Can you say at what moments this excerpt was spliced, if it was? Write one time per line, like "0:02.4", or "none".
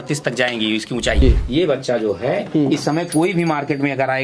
0:01.2

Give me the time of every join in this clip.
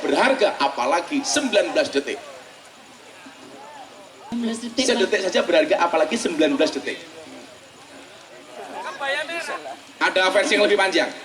0:04.3

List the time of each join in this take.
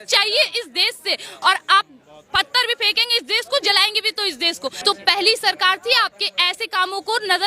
0:04.8

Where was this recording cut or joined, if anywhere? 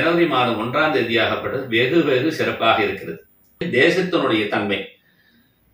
0:03.7

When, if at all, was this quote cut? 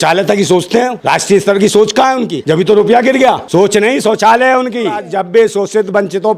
0:01.0
0:02.3
0:03.4
0:05.1

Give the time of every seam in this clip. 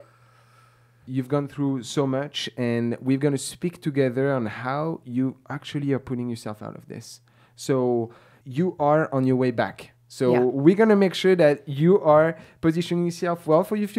none

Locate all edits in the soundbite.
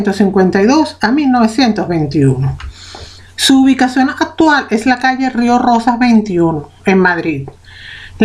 0:02.0

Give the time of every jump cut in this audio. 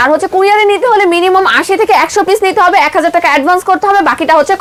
none

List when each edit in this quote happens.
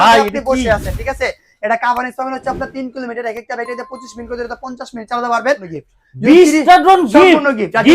0:05.7

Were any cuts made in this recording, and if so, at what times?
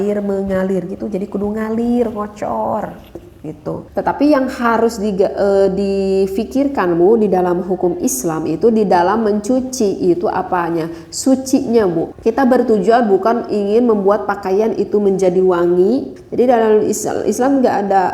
0:03.8
0:12.1
0:16.2

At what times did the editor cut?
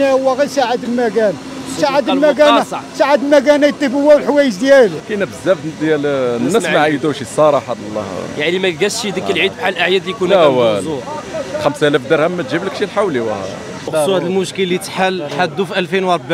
0:05.0
0:13.9

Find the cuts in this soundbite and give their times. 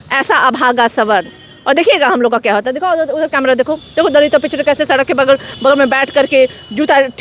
none

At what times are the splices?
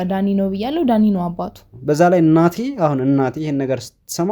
0:01.7

